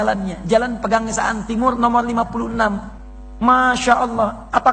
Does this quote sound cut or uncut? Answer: uncut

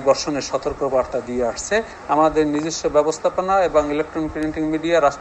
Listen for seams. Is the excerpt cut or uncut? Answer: cut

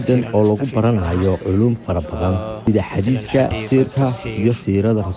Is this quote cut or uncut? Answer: cut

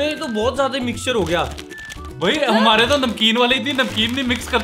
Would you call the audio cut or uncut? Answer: uncut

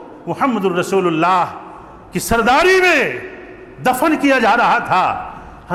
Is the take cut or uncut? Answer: uncut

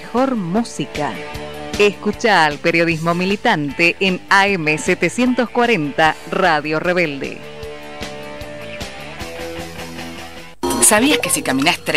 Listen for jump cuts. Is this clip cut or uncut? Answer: uncut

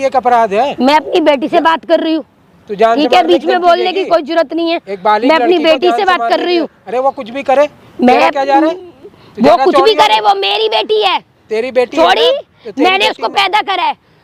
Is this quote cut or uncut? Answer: uncut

